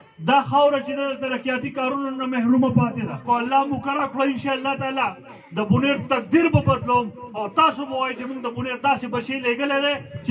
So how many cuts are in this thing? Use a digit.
1